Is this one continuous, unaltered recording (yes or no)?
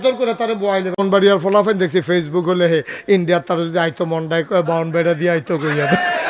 no